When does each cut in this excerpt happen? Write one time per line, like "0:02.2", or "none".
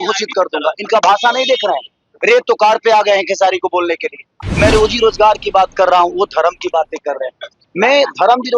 0:04.4